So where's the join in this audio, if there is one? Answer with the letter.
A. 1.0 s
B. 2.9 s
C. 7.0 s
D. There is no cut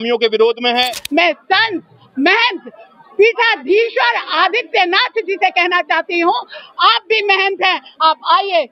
A